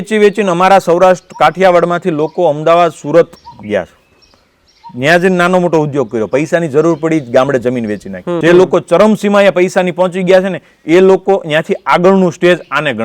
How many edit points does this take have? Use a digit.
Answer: 1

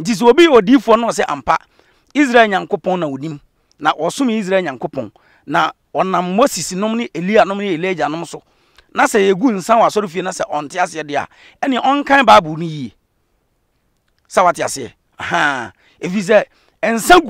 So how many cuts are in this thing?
0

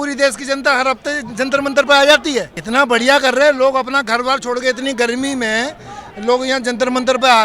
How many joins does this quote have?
1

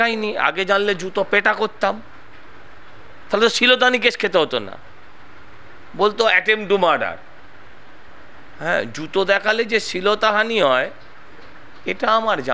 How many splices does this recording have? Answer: 0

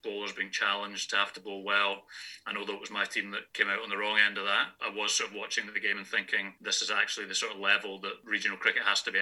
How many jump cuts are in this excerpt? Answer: 4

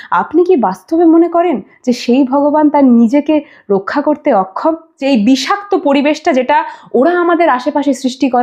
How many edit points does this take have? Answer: 1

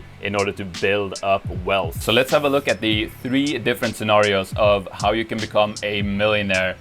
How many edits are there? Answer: 1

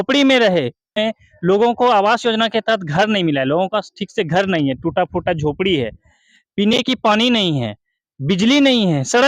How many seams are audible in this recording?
1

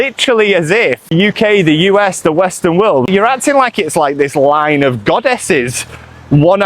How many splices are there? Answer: 2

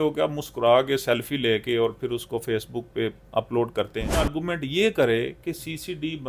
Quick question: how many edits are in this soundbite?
1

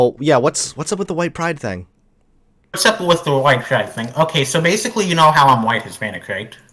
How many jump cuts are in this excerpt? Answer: 0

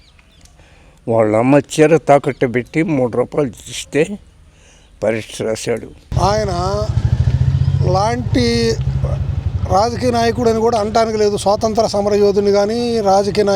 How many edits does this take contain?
1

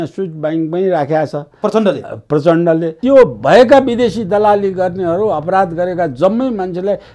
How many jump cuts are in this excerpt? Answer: 1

